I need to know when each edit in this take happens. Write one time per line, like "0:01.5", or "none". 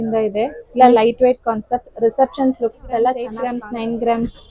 0:03.6